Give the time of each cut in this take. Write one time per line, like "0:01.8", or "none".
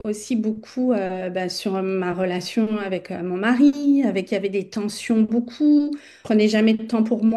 0:06.1